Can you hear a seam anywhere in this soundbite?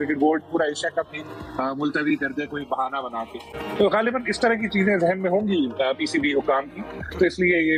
no; 0 cuts

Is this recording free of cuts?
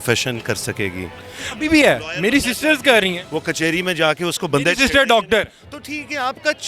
yes; 0 cuts

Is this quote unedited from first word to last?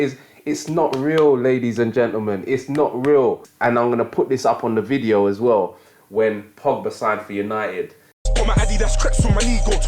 no; 2 cuts; at 3.5 s, 8.2 s

